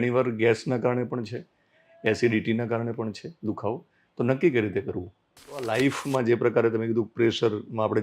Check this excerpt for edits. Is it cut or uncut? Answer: cut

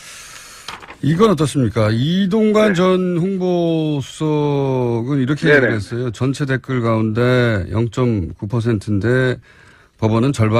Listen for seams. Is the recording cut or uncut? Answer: cut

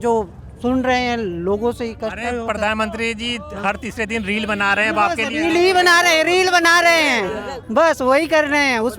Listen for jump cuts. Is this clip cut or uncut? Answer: uncut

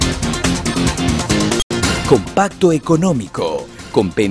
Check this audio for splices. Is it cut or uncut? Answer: uncut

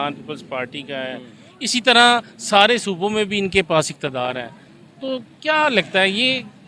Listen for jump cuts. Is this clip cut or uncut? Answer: uncut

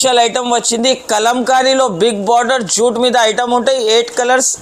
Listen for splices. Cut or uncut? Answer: uncut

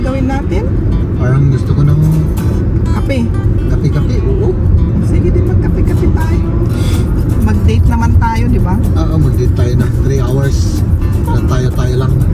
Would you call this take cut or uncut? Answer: uncut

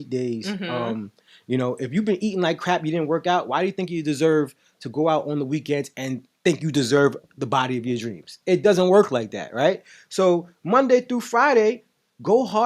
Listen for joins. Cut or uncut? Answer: uncut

